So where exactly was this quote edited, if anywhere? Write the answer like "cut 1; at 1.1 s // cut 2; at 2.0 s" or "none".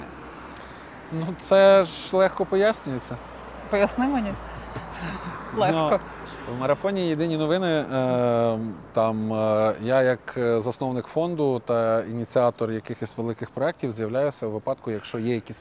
none